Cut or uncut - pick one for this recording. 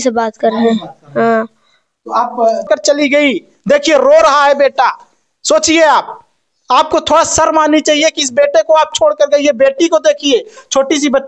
cut